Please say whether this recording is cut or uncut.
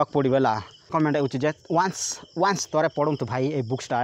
cut